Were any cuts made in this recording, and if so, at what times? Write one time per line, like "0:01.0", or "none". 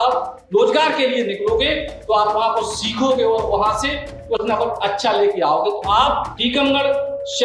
0:06.3